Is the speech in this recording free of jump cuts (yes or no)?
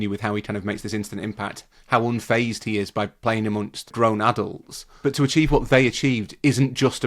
no